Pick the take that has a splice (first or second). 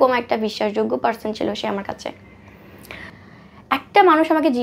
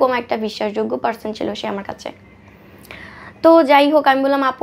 first